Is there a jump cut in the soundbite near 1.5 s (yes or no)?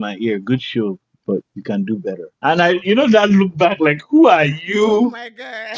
yes